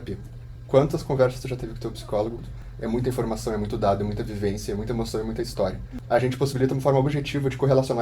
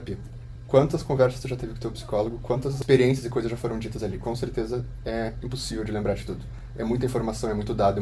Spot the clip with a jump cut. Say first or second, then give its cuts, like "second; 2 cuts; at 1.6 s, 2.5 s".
first; 2 cuts; at 2.4 s, 5.9 s